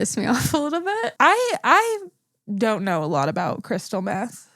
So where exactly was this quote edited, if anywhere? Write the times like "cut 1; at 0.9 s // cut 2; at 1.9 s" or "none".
cut 1; at 1.1 s